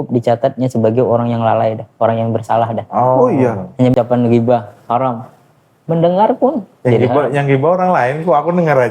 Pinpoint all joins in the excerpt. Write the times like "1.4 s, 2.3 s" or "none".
3.9 s